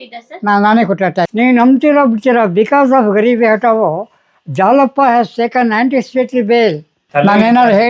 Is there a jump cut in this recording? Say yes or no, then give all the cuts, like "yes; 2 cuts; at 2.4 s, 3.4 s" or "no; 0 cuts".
yes; 2 cuts; at 1.3 s, 6.9 s